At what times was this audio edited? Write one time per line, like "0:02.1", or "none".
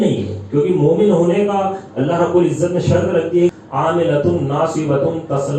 0:03.5